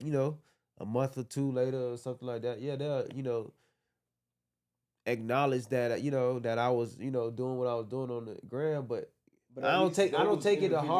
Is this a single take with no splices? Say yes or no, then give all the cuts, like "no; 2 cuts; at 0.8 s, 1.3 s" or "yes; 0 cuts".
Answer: yes; 0 cuts